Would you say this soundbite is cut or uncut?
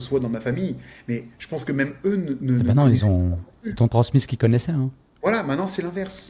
uncut